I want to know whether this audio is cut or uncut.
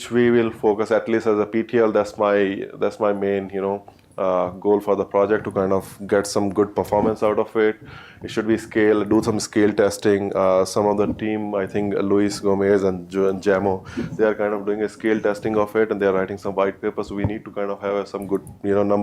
cut